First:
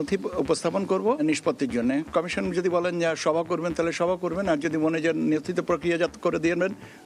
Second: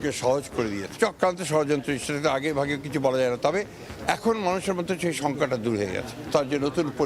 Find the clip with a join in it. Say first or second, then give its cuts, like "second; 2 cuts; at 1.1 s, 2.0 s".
second; 2 cuts; at 0.9 s, 6.3 s